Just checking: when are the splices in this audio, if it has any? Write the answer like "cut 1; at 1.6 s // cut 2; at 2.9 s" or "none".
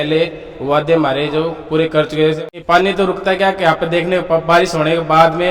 cut 1; at 2.6 s